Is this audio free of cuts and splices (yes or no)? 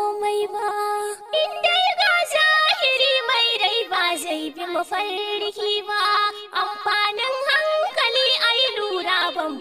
no